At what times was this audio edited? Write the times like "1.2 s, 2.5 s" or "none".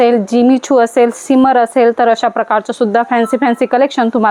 none